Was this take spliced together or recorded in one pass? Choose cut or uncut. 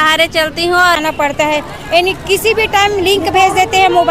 cut